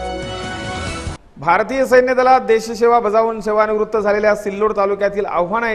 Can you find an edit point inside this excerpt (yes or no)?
yes